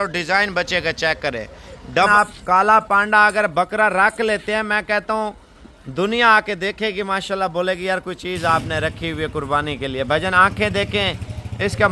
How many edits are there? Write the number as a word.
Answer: one